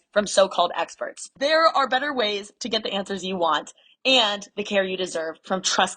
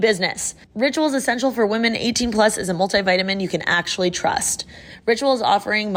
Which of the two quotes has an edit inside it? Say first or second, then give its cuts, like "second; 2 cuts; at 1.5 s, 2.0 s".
first; 1 cut; at 1.3 s